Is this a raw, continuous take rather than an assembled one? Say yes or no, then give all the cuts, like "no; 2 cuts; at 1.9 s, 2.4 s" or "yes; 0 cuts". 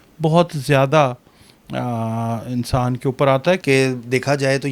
no; 1 cut; at 3.6 s